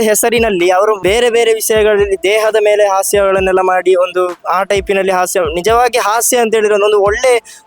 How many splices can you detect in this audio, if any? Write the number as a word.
one